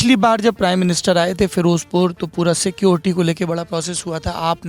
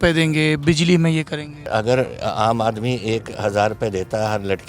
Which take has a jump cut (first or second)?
second